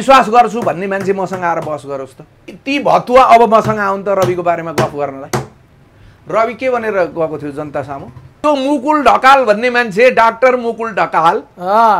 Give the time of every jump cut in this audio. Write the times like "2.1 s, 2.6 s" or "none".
2.6 s, 8.4 s